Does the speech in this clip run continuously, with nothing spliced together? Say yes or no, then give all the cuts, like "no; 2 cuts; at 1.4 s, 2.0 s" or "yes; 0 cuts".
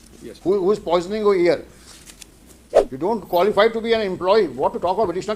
no; 1 cut; at 2.8 s